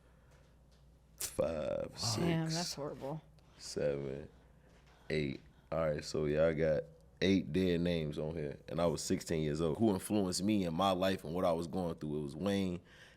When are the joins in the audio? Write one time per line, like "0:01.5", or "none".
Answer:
0:09.7